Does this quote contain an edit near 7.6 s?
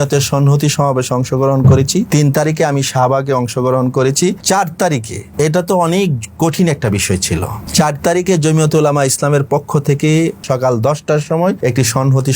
yes; 6 cuts; at 2.1 s, 4.4 s, 5.2 s, 7.6 s, 10.4 s, 11.6 s

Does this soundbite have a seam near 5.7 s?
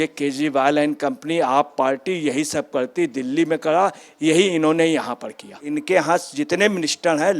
yes; 1 cut; at 5.7 s

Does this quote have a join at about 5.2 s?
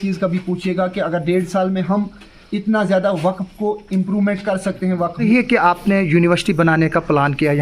yes; 1 cut; at 5.2 s

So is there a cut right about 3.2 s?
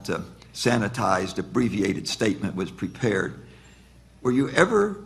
yes; 1 cut; at 3.2 s

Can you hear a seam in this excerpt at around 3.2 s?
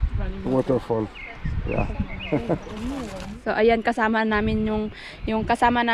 yes; 1 cut; at 3.2 s

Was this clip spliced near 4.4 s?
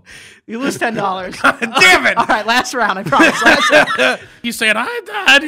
yes; 1 cut; at 4.4 s

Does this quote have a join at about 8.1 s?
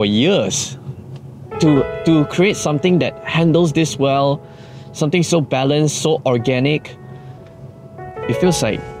yes; 1 cut; at 8.1 s

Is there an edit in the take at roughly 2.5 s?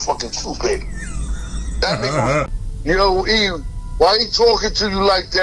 yes; 1 cut; at 2.5 s

